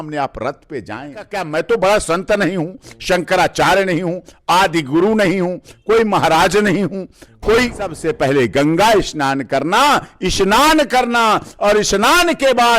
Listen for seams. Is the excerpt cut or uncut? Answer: cut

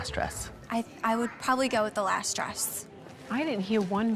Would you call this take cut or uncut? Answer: uncut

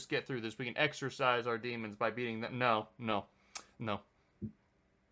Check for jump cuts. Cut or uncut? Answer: uncut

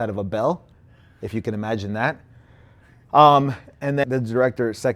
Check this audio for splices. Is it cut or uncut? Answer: cut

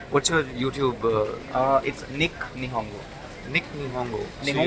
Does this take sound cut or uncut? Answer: uncut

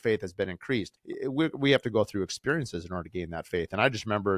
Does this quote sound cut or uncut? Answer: cut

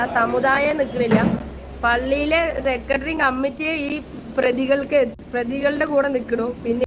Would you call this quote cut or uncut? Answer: uncut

